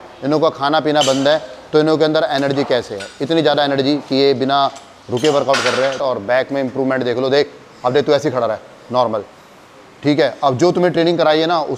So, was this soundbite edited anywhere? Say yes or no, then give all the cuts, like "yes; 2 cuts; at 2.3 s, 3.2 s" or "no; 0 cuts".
yes; 1 cut; at 6.0 s